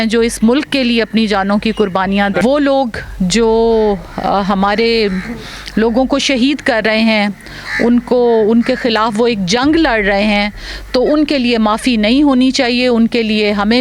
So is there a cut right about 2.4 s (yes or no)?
yes